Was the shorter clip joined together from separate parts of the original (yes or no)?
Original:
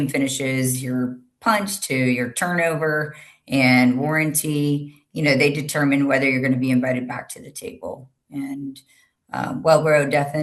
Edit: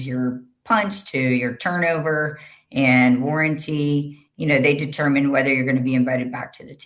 no